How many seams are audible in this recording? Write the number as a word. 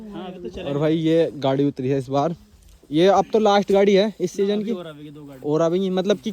zero